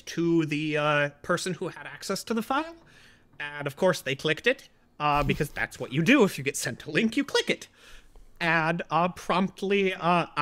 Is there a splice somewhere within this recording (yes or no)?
no